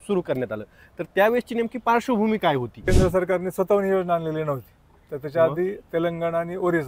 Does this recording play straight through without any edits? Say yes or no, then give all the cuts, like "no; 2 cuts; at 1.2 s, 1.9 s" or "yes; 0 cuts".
no; 1 cut; at 2.8 s